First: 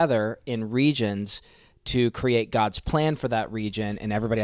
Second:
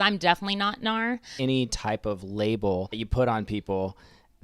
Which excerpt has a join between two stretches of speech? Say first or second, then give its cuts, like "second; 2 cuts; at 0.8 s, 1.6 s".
second; 2 cuts; at 1.3 s, 3.0 s